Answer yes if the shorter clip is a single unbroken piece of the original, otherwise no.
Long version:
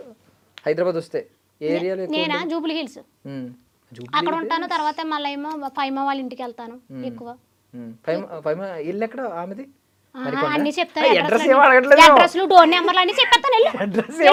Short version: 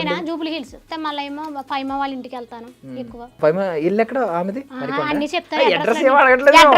no